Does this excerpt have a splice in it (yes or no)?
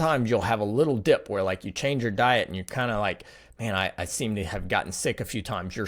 no